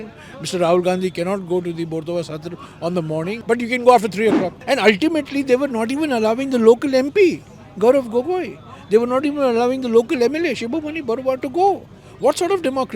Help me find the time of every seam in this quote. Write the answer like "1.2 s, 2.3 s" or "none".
3.4 s, 4.5 s